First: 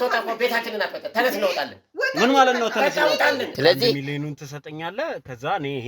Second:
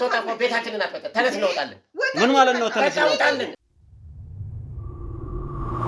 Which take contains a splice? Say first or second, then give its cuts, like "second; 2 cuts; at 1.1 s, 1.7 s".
first; 1 cut; at 3.5 s